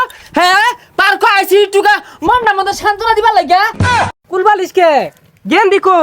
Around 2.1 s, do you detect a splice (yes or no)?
no